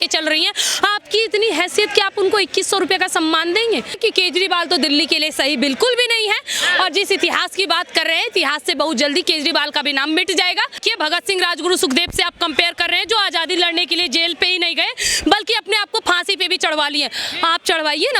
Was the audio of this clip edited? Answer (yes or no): yes